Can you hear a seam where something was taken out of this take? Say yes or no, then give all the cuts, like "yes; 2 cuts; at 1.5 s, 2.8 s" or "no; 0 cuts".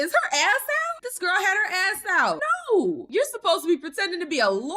yes; 3 cuts; at 1.0 s, 2.4 s, 3.0 s